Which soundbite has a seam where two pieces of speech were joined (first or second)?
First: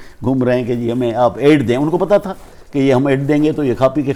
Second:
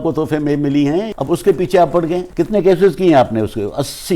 second